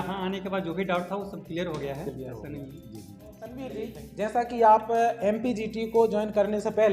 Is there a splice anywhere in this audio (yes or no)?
yes